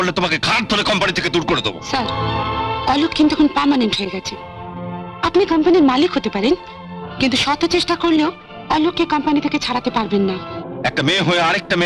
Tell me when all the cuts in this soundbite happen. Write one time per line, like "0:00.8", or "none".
none